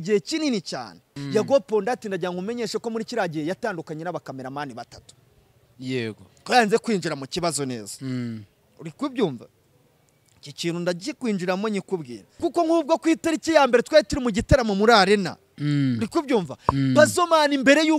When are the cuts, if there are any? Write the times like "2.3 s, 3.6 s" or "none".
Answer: 1.1 s, 12.4 s